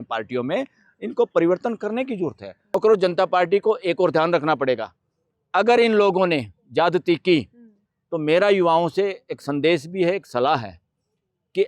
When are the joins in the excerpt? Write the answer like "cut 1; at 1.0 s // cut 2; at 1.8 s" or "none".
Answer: cut 1; at 2.7 s